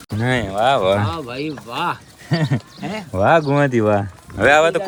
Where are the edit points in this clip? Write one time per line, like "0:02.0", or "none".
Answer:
none